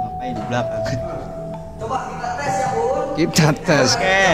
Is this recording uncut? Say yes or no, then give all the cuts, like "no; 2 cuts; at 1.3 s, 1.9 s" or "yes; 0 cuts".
yes; 0 cuts